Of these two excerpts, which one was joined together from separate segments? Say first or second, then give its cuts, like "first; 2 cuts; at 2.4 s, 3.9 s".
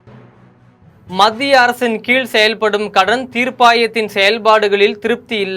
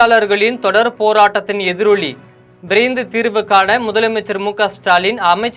first; 1 cut; at 1.0 s